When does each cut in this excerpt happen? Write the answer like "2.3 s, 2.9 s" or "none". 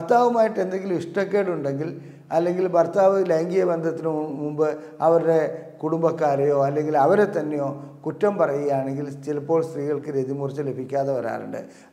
none